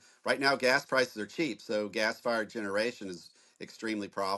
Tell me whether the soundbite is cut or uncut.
uncut